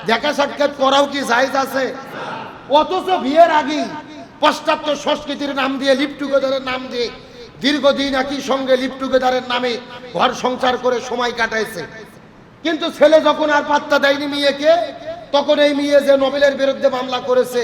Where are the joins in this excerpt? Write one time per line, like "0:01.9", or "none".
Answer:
none